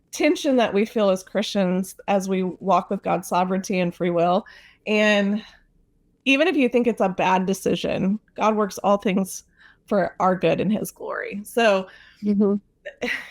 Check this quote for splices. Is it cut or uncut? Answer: uncut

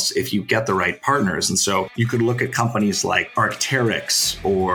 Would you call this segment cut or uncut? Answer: cut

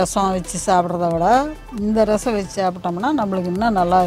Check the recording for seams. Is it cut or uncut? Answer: uncut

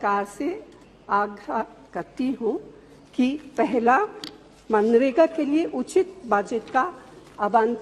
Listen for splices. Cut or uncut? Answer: uncut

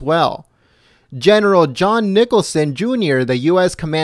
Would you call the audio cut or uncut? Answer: cut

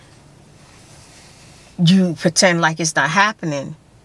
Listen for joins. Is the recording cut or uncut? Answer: uncut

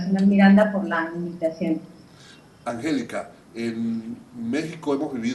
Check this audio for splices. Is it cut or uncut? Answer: uncut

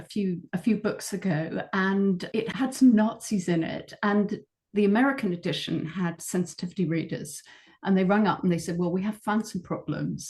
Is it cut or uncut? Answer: cut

